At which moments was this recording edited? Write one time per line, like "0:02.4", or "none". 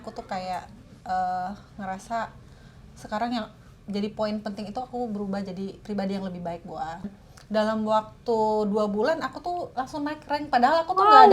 0:07.1

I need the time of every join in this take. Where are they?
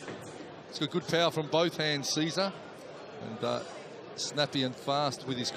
0:04.0

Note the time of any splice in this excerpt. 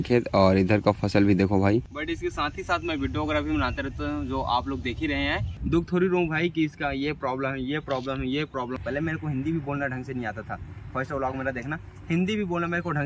0:02.0
0:05.5
0:08.8

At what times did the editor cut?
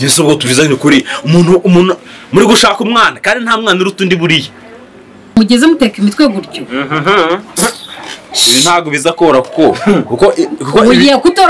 0:05.4

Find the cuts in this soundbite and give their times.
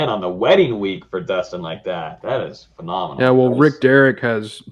none

